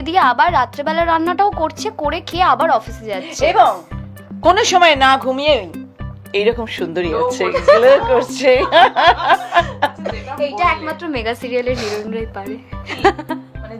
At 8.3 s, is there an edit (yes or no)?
no